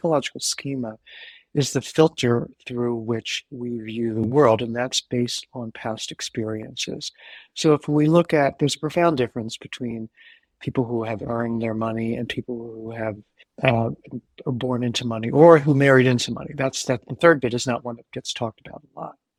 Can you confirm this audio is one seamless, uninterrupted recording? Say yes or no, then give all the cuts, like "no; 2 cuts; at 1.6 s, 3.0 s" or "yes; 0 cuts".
yes; 0 cuts